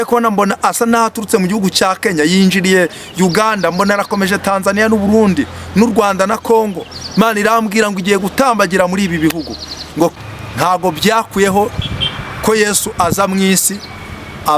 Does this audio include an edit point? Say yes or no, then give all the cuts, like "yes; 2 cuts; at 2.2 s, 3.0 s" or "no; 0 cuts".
yes; 1 cut; at 10.1 s